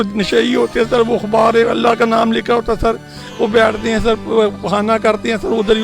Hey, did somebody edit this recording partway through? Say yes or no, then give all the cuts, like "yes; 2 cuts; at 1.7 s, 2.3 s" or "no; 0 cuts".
no; 0 cuts